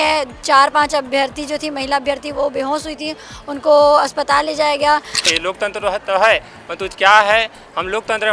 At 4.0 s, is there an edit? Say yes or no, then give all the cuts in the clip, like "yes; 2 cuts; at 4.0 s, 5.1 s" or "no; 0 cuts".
no; 1 cut; at 5.3 s